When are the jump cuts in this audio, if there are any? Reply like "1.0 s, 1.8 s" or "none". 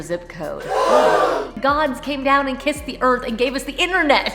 1.6 s